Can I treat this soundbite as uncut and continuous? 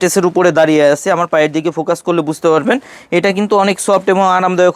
yes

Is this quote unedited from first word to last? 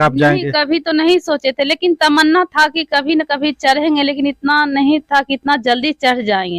yes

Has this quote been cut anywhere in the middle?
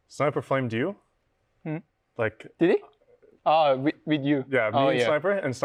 no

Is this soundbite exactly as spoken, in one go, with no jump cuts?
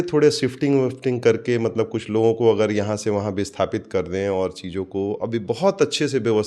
yes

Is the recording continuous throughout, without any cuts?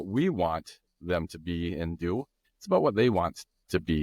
yes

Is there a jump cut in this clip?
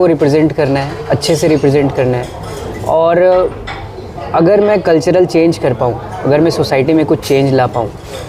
no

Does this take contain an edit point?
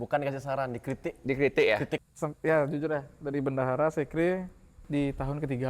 yes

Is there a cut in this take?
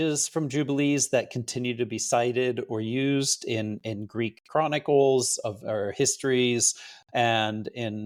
no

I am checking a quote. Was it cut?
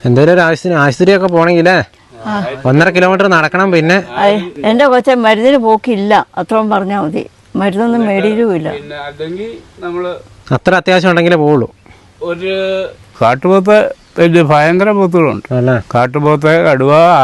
yes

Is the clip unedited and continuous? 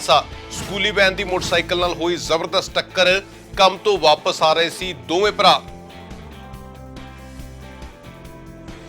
no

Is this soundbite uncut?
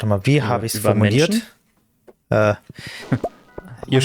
yes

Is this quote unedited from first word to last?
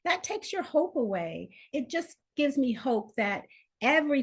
no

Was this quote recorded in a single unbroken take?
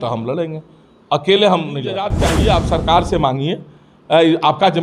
no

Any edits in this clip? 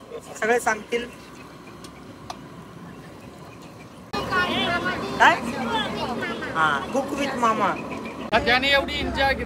yes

